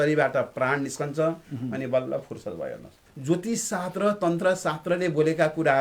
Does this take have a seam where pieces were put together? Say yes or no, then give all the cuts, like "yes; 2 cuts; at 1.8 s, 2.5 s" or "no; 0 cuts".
yes; 1 cut; at 3.1 s